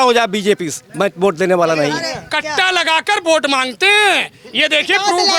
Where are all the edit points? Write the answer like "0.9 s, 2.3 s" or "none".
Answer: 2.2 s